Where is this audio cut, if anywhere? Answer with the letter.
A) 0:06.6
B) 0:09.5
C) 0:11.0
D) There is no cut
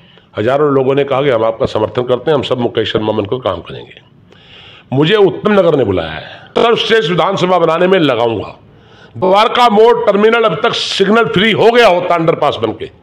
A